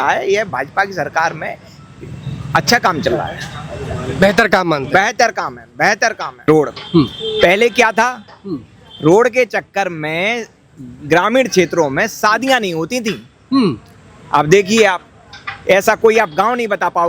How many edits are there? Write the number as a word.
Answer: one